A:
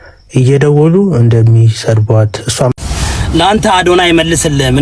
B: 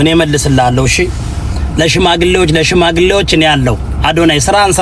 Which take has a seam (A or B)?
A